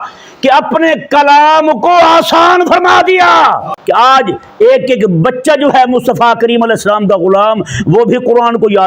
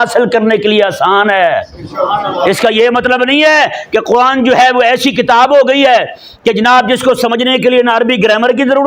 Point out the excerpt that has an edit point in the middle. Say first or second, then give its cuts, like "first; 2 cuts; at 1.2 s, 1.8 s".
first; 1 cut; at 3.7 s